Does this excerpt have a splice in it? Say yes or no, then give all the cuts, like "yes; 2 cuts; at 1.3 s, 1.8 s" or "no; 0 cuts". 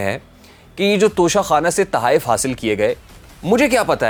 no; 0 cuts